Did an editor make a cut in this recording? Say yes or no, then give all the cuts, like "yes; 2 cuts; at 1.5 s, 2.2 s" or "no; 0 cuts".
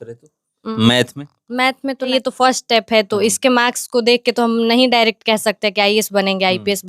yes; 1 cut; at 2.1 s